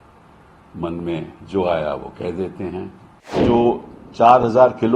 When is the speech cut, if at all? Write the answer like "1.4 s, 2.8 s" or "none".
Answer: 3.4 s